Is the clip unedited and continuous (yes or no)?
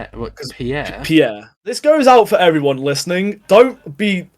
no